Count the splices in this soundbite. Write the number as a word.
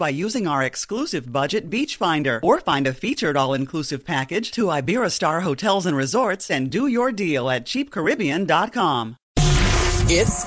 one